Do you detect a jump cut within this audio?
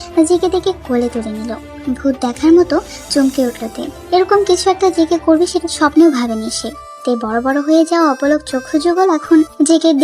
no; 0 cuts

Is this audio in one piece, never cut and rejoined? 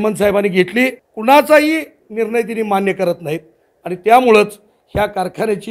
no; 1 cut; at 1.1 s

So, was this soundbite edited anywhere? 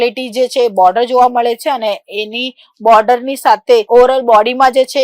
no; 0 cuts

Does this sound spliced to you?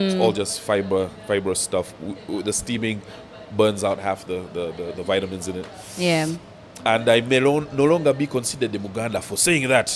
no; 0 cuts

